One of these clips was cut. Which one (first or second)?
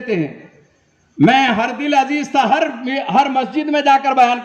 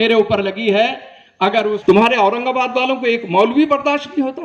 second